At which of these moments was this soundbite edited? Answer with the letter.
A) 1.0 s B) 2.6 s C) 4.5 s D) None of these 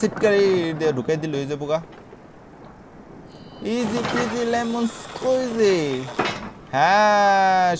D